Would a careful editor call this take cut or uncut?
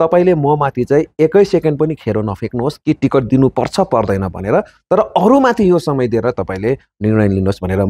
uncut